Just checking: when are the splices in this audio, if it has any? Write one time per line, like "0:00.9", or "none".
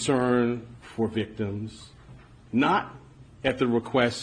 none